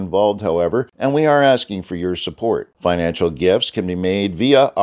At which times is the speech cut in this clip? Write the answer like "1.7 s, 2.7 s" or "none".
0.9 s, 2.7 s